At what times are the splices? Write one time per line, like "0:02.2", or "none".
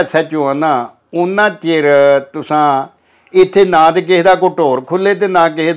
none